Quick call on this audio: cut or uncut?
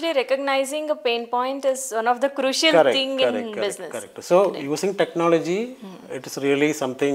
uncut